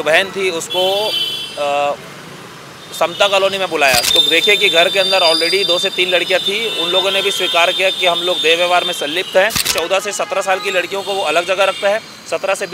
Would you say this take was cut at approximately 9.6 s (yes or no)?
yes